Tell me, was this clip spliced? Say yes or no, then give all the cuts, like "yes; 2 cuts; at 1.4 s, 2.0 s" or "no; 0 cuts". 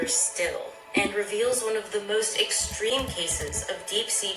no; 0 cuts